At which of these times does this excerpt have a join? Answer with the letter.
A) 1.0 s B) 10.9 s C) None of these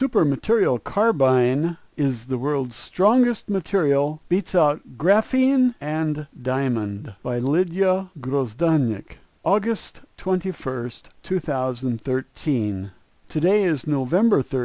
A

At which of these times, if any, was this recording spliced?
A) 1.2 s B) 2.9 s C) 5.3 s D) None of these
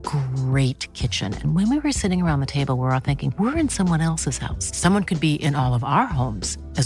D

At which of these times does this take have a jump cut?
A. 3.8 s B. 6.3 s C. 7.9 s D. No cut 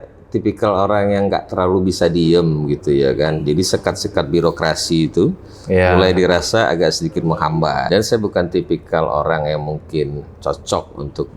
C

